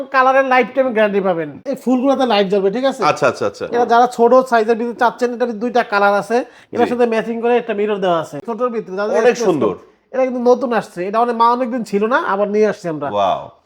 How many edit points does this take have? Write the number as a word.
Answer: two